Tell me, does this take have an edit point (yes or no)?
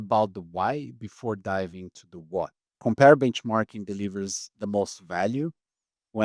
yes